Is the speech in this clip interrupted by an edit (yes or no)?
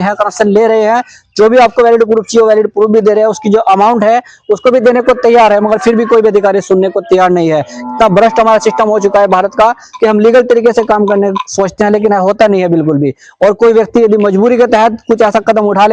no